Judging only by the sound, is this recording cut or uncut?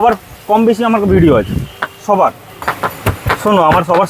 cut